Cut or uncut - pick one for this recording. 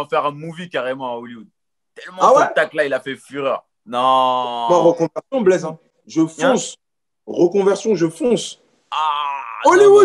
uncut